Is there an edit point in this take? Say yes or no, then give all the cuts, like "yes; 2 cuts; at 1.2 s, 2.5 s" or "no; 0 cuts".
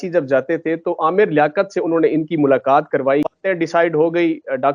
yes; 1 cut; at 3.3 s